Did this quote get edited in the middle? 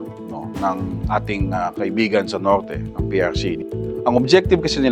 yes; 1 cut; at 3.6 s

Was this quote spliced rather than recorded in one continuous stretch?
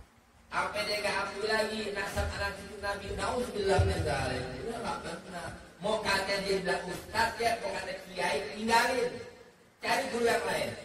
yes; 1 cut; at 9.9 s

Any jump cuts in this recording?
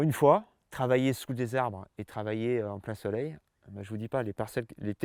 no; 0 cuts

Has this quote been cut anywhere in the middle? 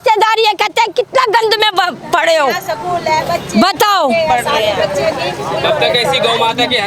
no; 0 cuts

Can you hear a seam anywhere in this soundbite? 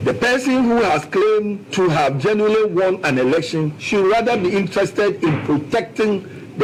no; 0 cuts

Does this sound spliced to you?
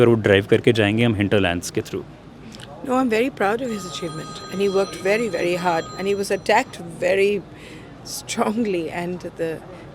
no; 0 cuts

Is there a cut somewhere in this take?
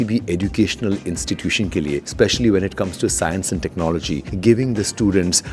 yes; 2 cuts; at 2.1 s, 4.3 s

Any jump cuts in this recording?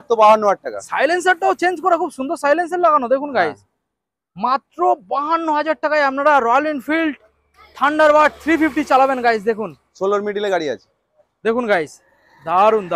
no; 0 cuts

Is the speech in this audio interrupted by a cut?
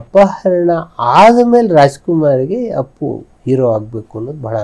no; 0 cuts

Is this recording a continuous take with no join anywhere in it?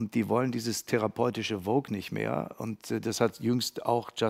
yes; 0 cuts

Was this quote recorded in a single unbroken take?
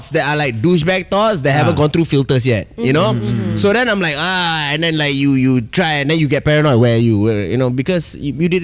yes; 0 cuts

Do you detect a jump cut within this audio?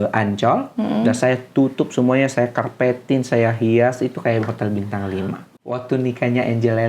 yes; 1 cut; at 5.5 s

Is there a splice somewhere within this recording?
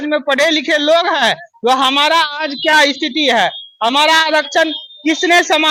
no; 0 cuts

